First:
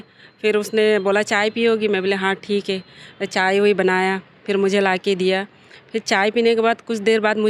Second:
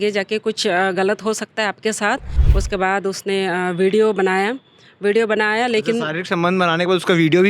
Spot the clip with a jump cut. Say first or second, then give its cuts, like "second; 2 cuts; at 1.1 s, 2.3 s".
second; 1 cut; at 2.4 s